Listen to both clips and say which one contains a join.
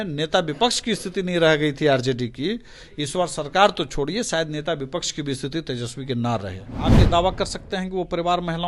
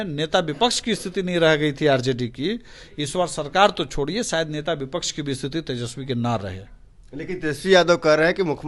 first; 1 cut; at 6.9 s

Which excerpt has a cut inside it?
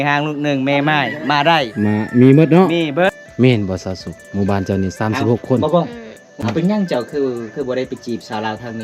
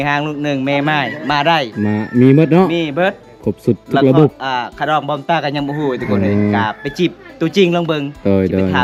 first; 2 cuts; at 3.2 s, 6.5 s

